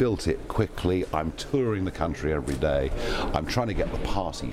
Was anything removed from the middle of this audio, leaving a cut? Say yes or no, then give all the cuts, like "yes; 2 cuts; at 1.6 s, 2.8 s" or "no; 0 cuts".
no; 0 cuts